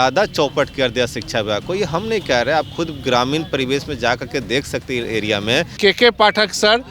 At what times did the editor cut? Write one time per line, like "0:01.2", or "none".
0:05.8